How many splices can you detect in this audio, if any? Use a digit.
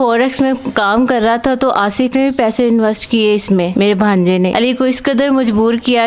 2